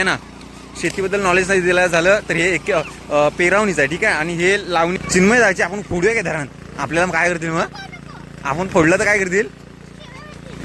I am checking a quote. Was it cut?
yes; 1 cut; at 5.0 s

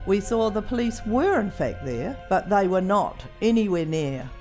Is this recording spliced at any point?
yes; 1 cut; at 2.1 s

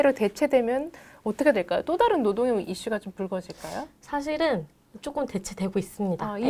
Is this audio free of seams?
yes; 0 cuts

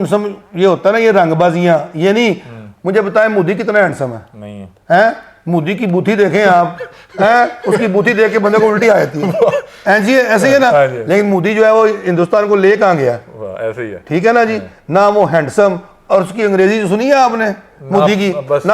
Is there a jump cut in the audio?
no; 0 cuts

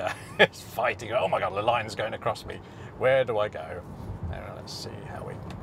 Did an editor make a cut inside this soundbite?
no; 0 cuts

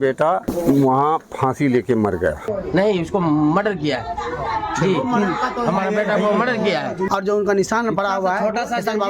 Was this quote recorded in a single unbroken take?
no; 2 cuts; at 2.5 s, 7.0 s

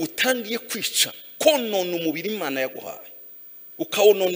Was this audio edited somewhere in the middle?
no; 0 cuts

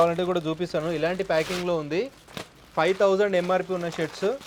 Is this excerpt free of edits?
yes; 0 cuts

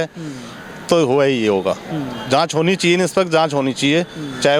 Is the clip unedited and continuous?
yes; 0 cuts

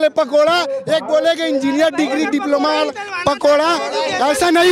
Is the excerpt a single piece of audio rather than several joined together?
yes; 0 cuts

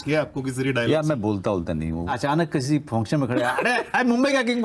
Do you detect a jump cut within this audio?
yes; 2 cuts; at 2.1 s, 3.9 s

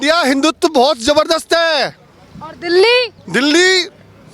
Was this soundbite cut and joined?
no; 0 cuts

